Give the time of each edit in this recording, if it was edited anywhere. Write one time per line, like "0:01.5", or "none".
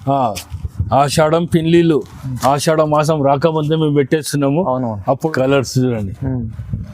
0:05.3